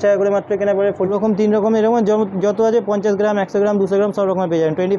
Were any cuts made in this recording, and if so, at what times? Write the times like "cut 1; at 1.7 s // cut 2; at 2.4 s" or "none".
cut 1; at 1.1 s